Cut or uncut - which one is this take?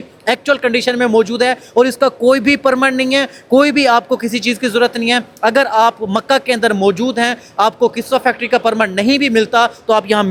uncut